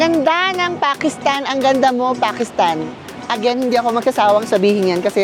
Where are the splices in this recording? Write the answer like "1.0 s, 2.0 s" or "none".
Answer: none